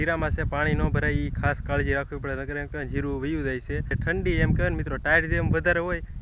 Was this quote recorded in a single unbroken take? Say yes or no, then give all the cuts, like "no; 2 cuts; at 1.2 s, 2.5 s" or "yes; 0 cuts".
no; 1 cut; at 3.9 s